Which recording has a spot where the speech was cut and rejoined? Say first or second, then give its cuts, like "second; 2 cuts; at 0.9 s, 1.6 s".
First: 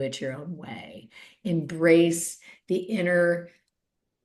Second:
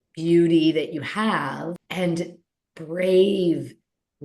second; 1 cut; at 1.8 s